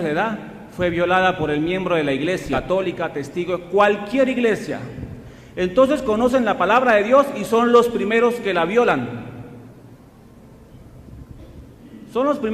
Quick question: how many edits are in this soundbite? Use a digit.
1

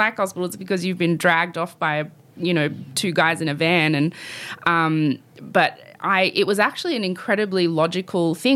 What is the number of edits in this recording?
0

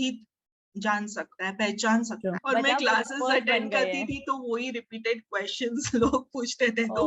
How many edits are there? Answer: 1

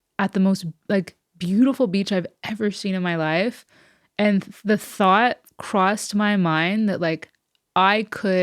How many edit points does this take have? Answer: 0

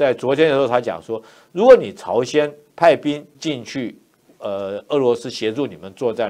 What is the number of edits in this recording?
1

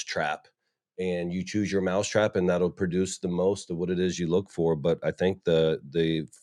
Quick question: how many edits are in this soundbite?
0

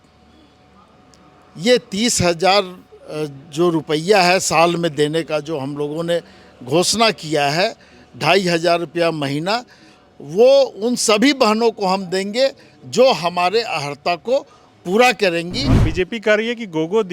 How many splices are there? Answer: 1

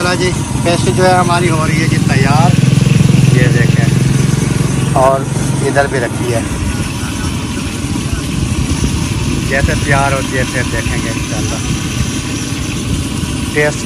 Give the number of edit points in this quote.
0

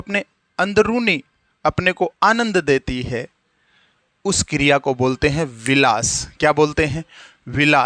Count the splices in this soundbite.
0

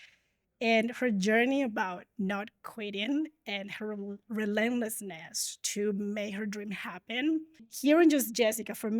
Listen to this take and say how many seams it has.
1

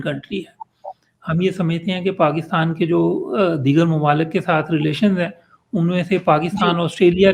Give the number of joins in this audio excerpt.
0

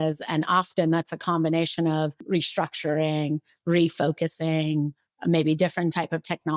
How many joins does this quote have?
1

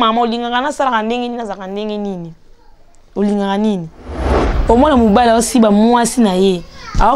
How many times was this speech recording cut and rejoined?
1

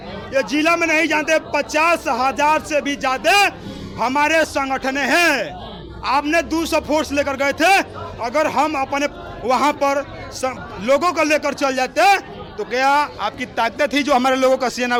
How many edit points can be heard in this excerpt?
0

